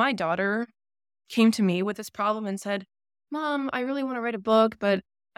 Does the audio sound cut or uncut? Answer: uncut